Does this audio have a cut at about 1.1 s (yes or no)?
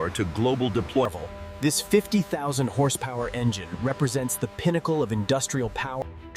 yes